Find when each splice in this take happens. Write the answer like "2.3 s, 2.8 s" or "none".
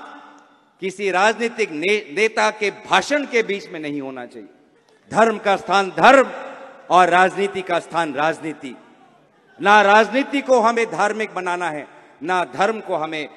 none